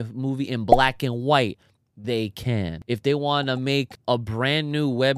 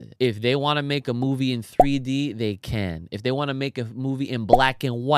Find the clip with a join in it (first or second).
first